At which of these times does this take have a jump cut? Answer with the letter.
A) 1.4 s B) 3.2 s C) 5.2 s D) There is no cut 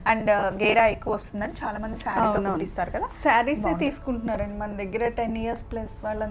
D